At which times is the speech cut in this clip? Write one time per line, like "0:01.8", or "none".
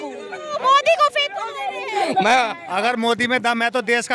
0:02.6